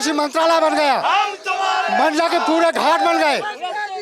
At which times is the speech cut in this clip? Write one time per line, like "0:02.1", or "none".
none